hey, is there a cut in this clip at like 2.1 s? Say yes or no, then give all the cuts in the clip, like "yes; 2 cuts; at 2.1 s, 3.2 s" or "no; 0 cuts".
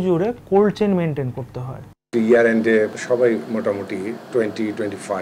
yes; 3 cuts; at 2.1 s, 3.0 s, 4.2 s